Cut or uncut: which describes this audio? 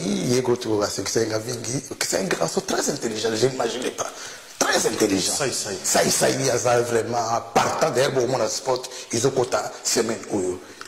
uncut